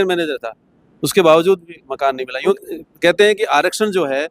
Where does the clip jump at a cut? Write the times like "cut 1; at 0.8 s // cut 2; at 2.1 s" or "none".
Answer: cut 1; at 2.6 s